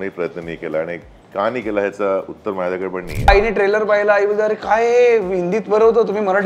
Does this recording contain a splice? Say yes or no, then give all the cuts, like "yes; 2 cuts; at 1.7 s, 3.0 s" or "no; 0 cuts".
yes; 1 cut; at 3.3 s